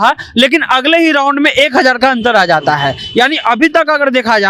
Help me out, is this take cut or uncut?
uncut